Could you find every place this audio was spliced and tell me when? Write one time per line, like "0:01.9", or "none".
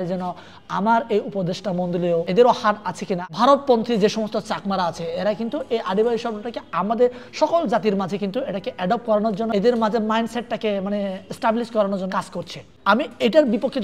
0:02.3
0:03.3
0:09.5
0:12.1